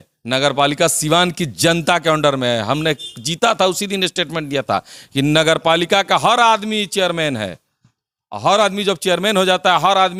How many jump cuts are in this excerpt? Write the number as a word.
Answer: zero